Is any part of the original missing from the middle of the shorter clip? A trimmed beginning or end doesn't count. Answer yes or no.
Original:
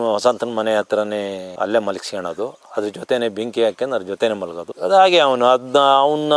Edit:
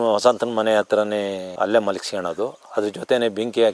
no